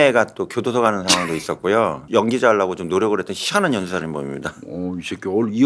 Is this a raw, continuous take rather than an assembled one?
no; 1 cut; at 2.0 s

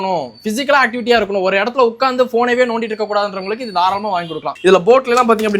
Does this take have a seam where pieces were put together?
yes; 1 cut; at 4.5 s

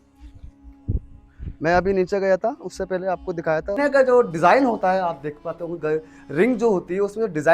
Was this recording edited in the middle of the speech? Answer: yes; 1 cut; at 3.8 s

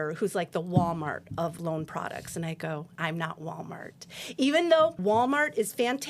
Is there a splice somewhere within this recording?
yes; 3 cuts; at 1.6 s, 2.9 s, 5.0 s

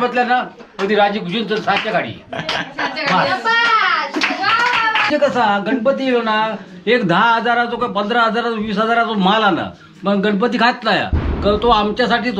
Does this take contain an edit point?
yes; 1 cut; at 5.0 s

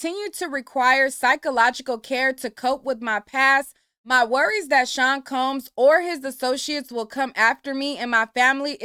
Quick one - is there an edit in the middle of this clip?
no; 0 cuts

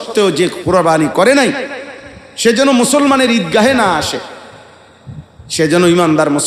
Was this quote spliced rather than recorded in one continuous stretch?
no; 0 cuts

